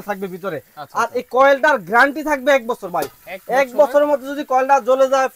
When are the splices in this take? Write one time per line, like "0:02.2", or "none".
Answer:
none